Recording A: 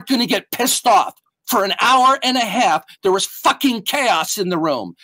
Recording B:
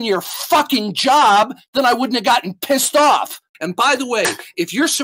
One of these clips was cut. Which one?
B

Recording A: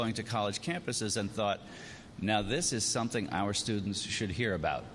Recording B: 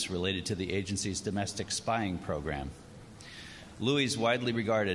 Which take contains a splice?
B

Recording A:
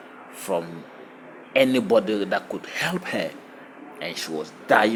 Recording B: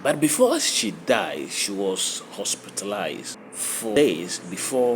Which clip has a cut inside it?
B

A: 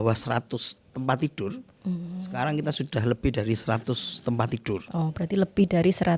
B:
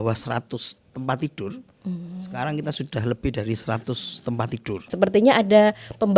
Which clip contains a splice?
B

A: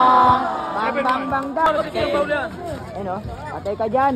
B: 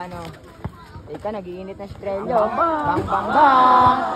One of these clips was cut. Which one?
A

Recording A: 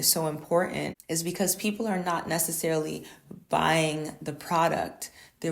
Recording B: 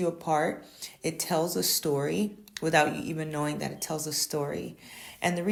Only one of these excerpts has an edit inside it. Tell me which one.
A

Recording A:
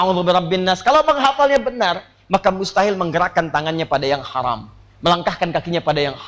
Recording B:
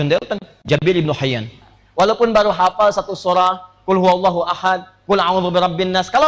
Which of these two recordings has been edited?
B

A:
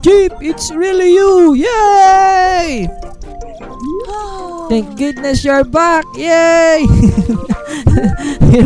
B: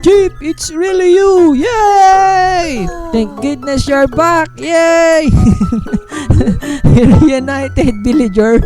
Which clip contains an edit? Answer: B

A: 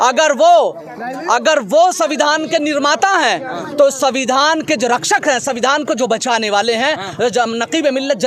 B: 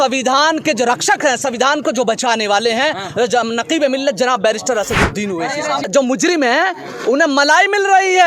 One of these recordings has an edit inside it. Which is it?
B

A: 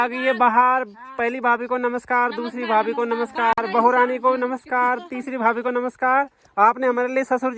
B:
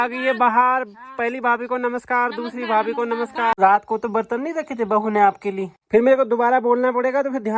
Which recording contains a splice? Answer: B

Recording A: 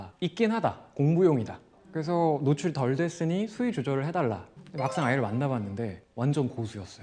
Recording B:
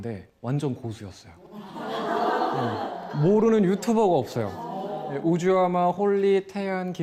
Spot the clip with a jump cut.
A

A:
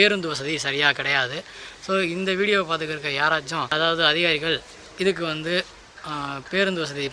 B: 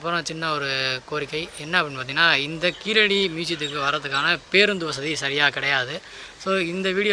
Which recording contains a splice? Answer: A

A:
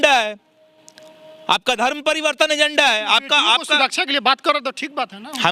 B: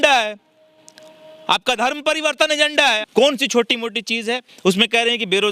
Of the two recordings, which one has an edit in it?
B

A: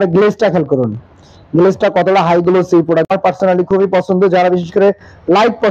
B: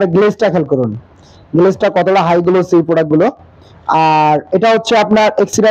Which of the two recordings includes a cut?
A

